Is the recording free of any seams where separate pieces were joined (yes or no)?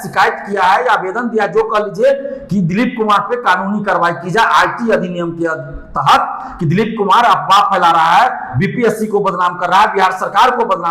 yes